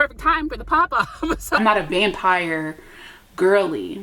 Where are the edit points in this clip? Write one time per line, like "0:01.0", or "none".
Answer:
0:01.6